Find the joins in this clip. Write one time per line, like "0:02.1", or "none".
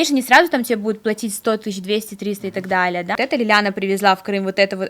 0:03.1